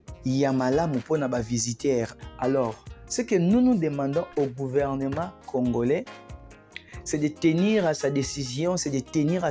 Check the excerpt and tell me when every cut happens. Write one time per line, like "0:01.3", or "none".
0:02.1